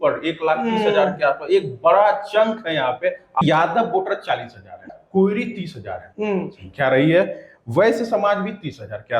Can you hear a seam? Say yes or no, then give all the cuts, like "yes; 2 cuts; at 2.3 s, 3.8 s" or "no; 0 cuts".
yes; 2 cuts; at 3.4 s, 4.9 s